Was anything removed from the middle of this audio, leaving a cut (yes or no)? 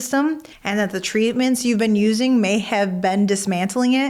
no